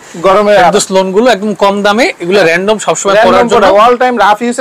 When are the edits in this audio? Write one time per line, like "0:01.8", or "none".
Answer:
none